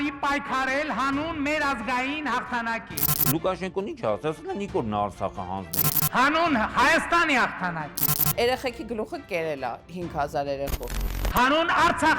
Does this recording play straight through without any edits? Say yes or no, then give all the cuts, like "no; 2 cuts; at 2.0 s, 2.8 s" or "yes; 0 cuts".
yes; 0 cuts